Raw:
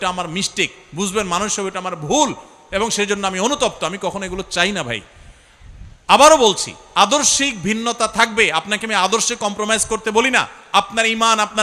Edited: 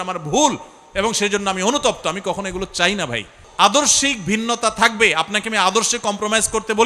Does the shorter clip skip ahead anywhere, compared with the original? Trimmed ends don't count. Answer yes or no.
yes